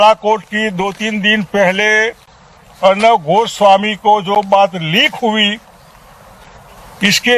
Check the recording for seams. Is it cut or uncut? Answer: uncut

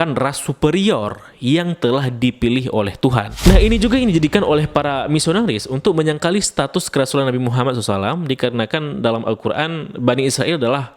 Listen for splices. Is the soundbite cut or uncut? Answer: cut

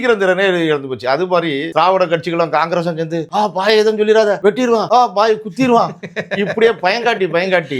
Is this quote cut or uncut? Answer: cut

